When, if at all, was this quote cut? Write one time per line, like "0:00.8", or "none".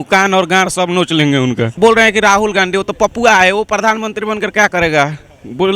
0:01.8